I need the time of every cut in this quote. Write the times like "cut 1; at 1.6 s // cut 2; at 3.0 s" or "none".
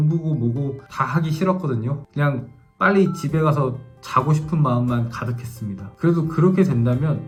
none

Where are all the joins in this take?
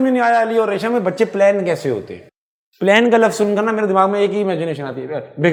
none

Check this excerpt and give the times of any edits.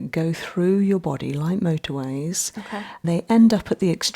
cut 1; at 3.0 s

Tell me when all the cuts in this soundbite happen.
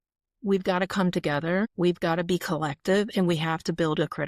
cut 1; at 1.7 s

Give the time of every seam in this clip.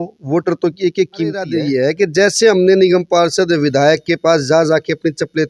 cut 1; at 1.6 s

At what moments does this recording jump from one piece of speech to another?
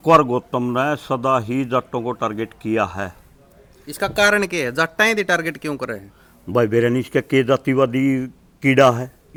none

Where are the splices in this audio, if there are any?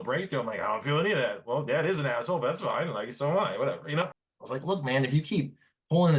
cut 1; at 4.2 s

